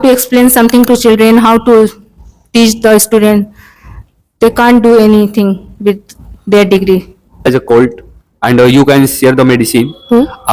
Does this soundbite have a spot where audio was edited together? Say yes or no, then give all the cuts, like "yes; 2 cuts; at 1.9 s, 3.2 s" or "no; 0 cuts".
yes; 1 cut; at 7.5 s